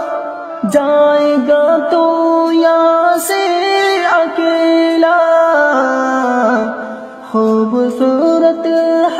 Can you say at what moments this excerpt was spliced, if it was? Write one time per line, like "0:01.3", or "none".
none